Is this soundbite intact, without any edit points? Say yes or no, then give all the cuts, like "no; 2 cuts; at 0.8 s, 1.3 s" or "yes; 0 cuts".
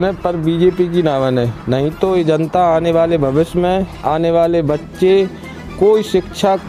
yes; 0 cuts